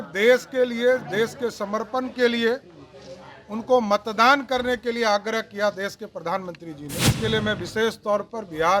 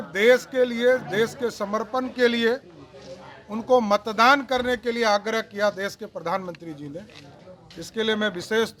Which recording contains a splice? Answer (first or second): first